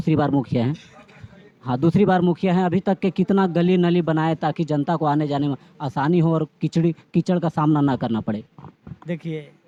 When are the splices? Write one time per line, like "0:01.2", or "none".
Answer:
none